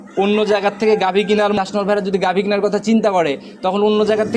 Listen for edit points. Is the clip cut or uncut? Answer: cut